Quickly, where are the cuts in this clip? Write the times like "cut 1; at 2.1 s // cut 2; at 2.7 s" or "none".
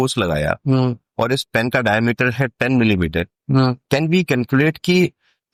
none